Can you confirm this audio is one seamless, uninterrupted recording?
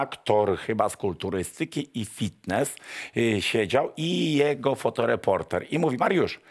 yes; 0 cuts

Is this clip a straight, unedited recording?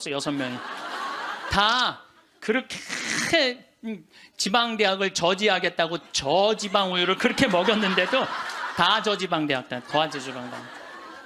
yes; 0 cuts

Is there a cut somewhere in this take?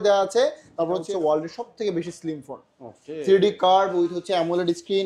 yes; 1 cut; at 1.0 s

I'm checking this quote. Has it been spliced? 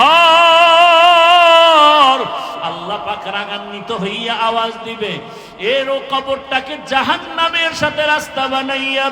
yes; 1 cut; at 2.6 s

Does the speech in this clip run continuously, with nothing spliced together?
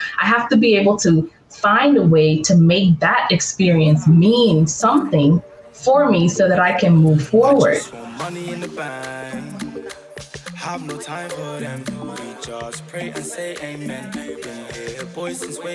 no; 1 cut; at 7.9 s

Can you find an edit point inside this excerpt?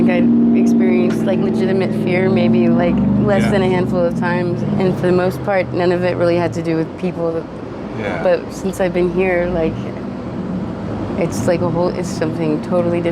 yes; 1 cut; at 4.6 s

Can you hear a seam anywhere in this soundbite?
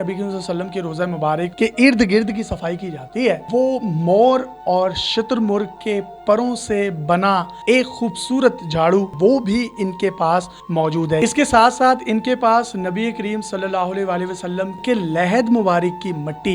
yes; 5 cuts; at 1.5 s, 3.4 s, 9.1 s, 11.2 s, 14.8 s

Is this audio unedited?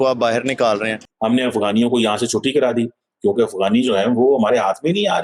no; 1 cut; at 0.9 s

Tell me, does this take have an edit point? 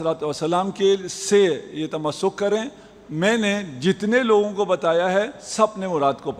no; 0 cuts

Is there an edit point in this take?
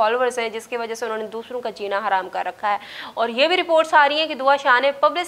no; 0 cuts

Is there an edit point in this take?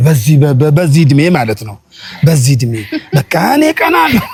no; 0 cuts

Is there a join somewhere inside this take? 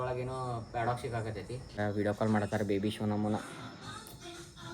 yes; 1 cut; at 1.8 s

